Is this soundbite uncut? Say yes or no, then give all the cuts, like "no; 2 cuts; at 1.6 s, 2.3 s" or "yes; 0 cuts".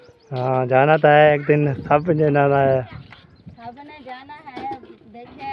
yes; 0 cuts